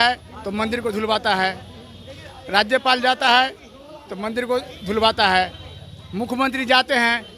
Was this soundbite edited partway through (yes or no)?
no